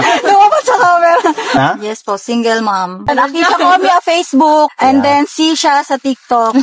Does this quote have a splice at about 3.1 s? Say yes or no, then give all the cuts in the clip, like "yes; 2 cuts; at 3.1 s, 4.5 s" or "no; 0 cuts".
yes; 2 cuts; at 1.6 s, 3.1 s